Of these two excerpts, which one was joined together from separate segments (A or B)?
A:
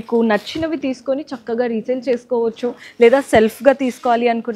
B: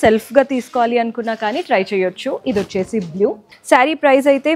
B